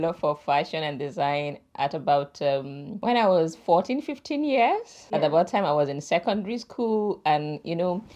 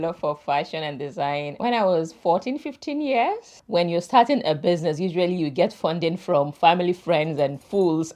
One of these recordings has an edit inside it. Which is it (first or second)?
second